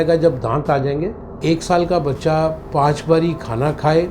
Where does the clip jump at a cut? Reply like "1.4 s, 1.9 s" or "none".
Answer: 1.4 s